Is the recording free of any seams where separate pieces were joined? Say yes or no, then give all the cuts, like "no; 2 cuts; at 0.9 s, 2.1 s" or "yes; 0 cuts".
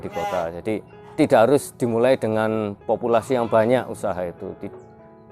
no; 1 cut; at 1.0 s